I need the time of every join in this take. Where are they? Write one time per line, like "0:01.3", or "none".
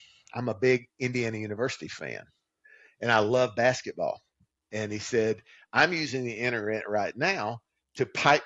none